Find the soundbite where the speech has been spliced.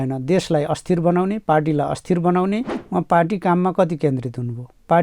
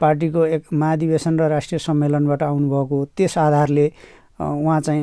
first; 1 cut; at 2.8 s

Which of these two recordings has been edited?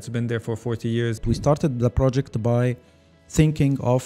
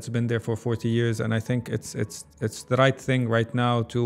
first; 1 cut; at 1.2 s

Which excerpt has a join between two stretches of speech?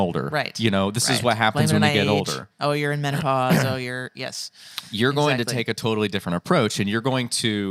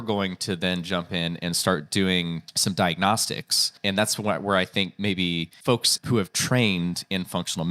second; 3 cuts; at 2.5 s, 3.7 s, 5.9 s

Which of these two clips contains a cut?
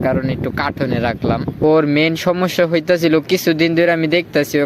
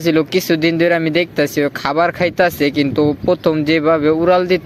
first; 1 cut; at 1.6 s

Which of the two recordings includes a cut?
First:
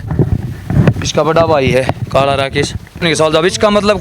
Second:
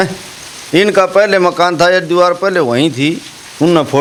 first; 1 cut; at 3.1 s

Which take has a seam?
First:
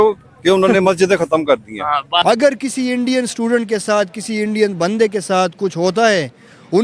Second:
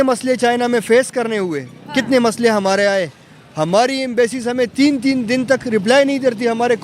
first; 1 cut; at 2.2 s

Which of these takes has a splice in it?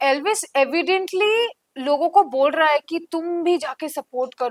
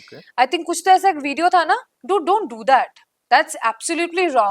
second; 1 cut; at 1.9 s

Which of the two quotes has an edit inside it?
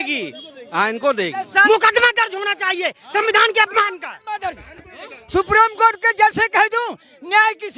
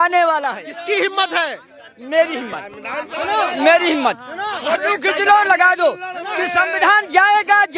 first; 1 cut; at 1.6 s

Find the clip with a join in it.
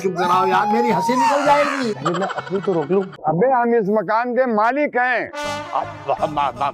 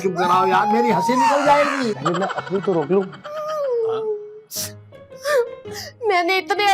first; 1 cut; at 3.1 s

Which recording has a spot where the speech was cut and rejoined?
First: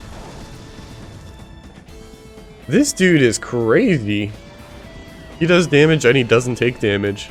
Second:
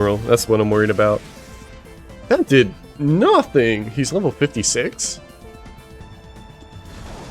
second; 1 cut; at 6.0 s

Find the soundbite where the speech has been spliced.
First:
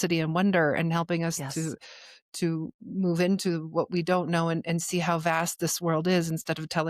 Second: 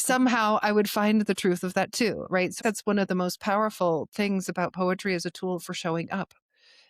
second; 1 cut; at 2.6 s

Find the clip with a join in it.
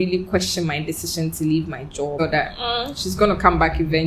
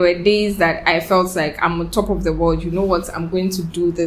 first; 1 cut; at 2.2 s

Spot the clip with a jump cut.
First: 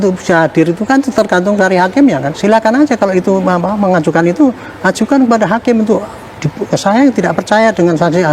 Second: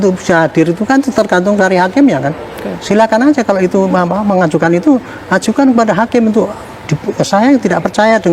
first; 1 cut; at 2.3 s

